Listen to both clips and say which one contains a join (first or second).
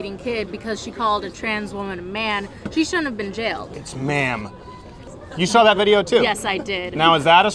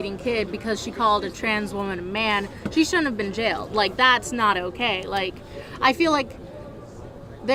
first